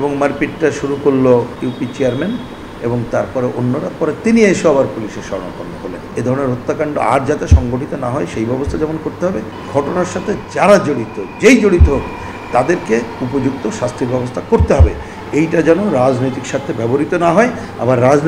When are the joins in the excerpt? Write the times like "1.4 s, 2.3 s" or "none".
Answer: 1.5 s, 6.1 s, 9.6 s